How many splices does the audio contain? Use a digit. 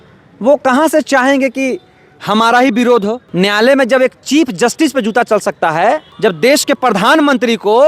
2